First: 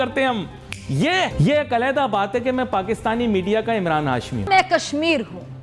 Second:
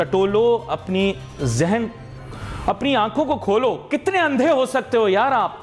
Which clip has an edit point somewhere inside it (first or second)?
first